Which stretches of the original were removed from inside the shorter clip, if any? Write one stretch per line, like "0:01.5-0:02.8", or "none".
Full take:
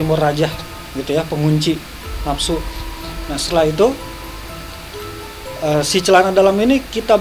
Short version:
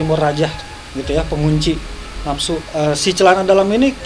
0:02.7-0:05.5